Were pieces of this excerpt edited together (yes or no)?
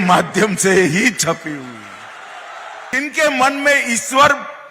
yes